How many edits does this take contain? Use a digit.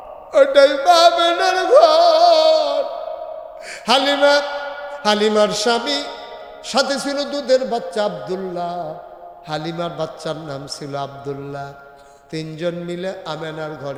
0